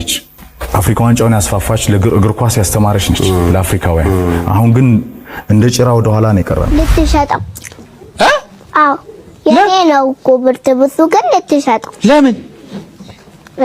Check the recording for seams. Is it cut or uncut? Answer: cut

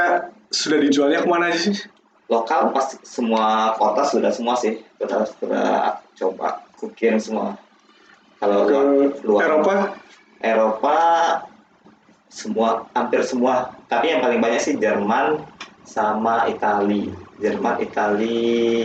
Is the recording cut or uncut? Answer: uncut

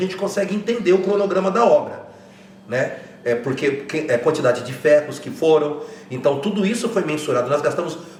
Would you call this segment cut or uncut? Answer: uncut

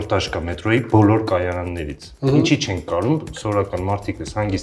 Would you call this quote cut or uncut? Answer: uncut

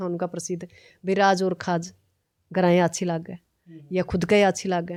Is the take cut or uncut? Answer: uncut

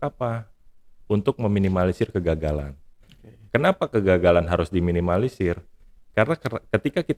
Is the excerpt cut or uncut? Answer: uncut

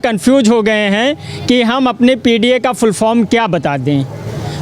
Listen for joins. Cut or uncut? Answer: uncut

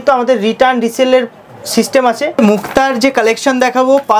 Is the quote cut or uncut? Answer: cut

